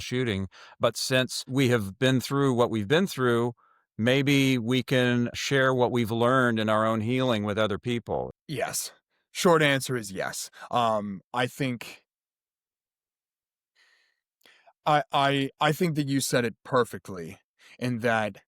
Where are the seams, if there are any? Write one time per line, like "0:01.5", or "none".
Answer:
0:01.4
0:05.4
0:08.3